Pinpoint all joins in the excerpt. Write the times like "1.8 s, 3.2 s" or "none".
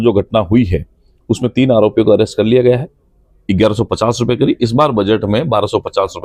2.9 s